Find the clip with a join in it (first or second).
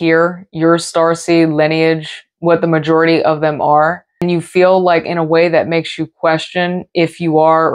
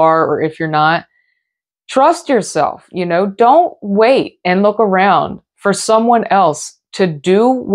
first